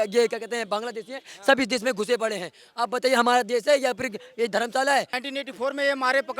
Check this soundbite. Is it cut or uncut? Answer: cut